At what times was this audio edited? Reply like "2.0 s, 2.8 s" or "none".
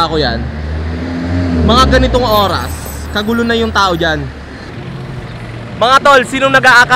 4.8 s